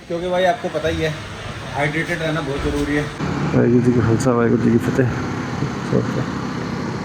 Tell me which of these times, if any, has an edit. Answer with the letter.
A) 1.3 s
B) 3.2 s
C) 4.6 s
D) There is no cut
B